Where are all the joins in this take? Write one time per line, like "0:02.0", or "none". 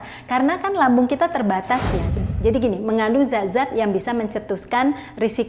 0:02.1